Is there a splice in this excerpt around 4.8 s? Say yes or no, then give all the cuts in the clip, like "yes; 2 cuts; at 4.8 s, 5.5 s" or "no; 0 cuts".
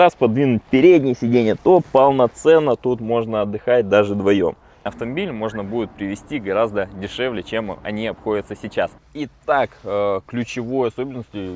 yes; 2 cuts; at 4.8 s, 9.0 s